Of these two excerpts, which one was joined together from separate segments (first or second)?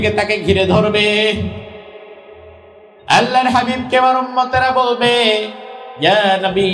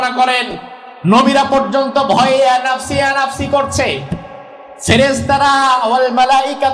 second